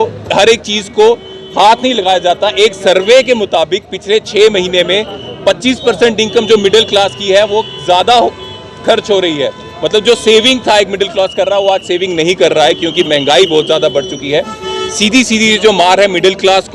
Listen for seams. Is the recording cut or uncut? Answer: uncut